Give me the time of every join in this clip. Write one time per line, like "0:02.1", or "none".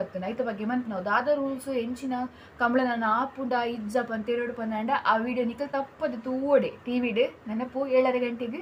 none